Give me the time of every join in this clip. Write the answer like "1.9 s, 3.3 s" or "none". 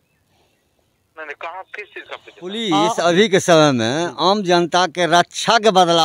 2.6 s

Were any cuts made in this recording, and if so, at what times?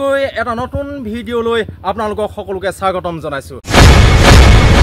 3.7 s

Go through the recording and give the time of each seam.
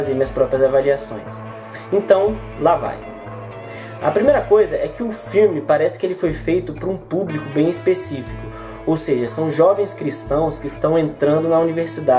11.0 s

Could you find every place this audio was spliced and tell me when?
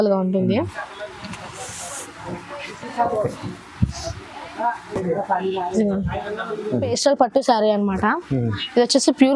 6.9 s

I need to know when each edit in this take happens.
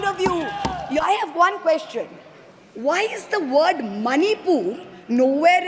1.0 s

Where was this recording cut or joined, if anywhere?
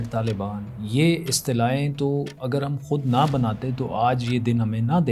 none

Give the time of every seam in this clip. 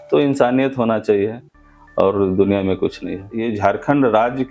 3.4 s

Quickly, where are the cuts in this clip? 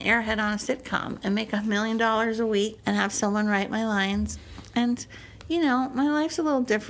1.6 s, 2.8 s

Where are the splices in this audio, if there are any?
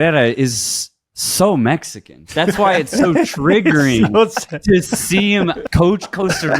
5.6 s

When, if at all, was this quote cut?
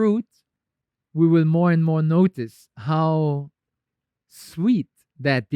none

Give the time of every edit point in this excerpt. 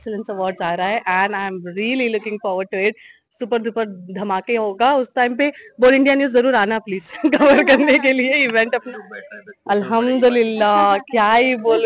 8.9 s

